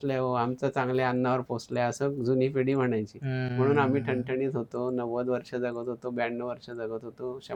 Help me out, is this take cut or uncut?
uncut